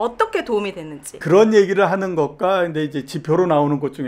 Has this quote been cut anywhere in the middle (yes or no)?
yes